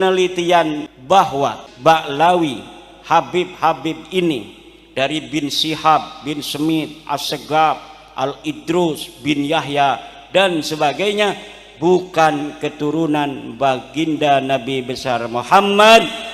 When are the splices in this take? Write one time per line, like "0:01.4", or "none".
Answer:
0:00.9
0:01.7